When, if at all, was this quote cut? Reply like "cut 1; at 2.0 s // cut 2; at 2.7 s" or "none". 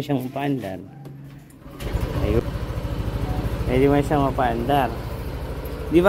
cut 1; at 2.4 s